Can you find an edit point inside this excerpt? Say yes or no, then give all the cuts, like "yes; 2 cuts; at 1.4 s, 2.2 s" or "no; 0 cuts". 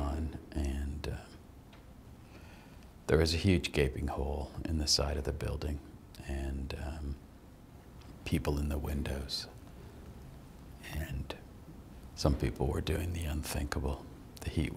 yes; 2 cuts; at 7.8 s, 11.9 s